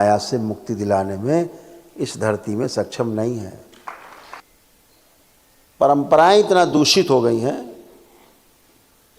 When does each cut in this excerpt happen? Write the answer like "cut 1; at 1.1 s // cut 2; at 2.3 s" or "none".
cut 1; at 4.3 s